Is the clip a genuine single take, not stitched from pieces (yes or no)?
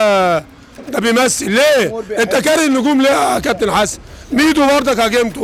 yes